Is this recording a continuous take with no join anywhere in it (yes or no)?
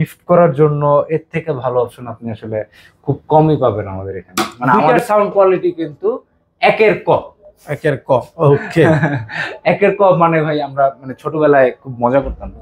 no